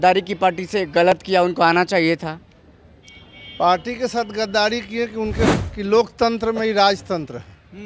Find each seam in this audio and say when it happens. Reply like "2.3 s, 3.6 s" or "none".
5.5 s